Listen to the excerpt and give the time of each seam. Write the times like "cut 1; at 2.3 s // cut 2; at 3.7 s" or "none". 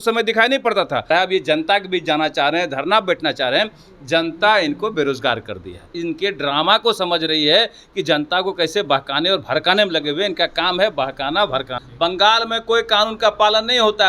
cut 1; at 1.1 s // cut 2; at 6.0 s // cut 3; at 11.8 s